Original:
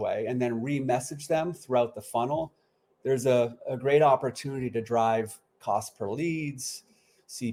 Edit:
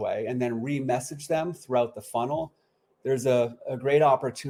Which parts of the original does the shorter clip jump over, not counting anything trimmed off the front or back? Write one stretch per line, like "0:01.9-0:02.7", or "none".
none

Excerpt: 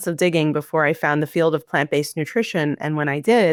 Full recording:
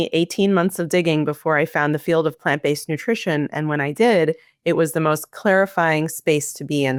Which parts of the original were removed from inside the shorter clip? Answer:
none

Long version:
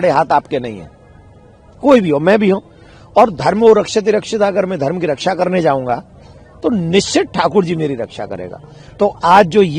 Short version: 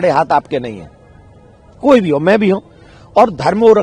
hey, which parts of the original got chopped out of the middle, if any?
none

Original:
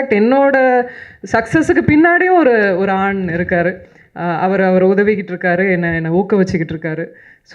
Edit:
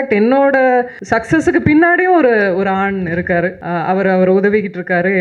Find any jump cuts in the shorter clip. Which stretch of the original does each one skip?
0:01.0-0:01.2
0:03.8-0:04.1

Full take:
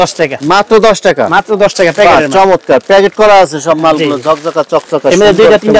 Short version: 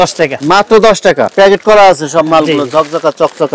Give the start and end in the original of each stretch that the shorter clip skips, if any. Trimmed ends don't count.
0:01.3-0:02.8

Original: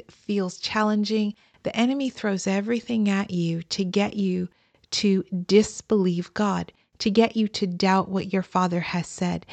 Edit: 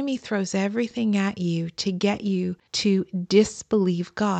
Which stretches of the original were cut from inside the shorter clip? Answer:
0:04.6-0:04.8

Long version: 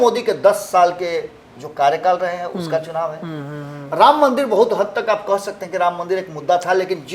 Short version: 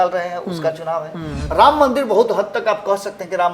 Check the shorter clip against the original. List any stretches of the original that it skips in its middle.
0:03.4-0:03.8

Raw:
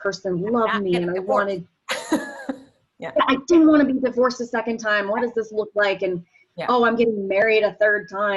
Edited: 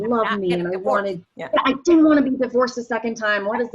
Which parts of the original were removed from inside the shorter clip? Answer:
0:01.7-0:02.9

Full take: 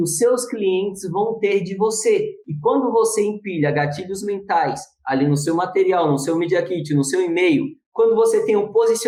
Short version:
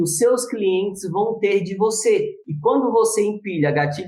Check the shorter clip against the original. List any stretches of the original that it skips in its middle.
none

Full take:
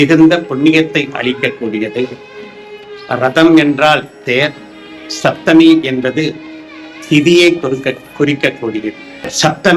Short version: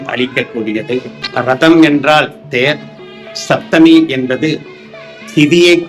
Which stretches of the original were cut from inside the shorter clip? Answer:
0:02.2-0:02.9

